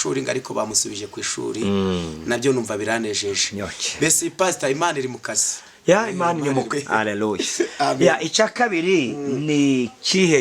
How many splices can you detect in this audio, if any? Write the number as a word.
one